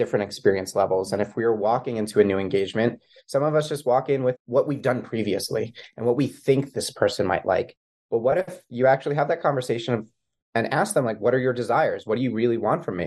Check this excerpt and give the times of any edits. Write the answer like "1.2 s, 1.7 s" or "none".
4.4 s

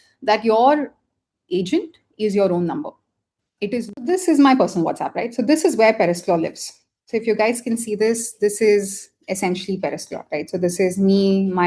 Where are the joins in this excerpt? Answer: 4.0 s

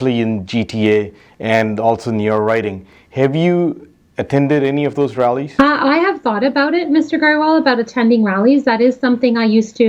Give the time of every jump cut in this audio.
5.5 s

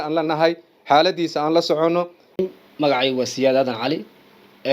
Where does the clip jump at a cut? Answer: none

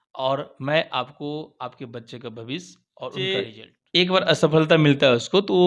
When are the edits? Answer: 3.2 s

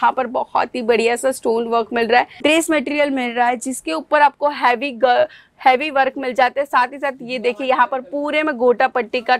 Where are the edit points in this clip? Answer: 2.3 s

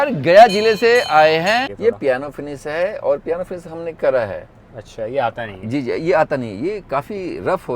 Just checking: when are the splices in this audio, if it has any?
1.7 s

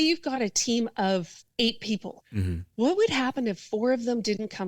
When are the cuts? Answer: 1.4 s, 2.2 s

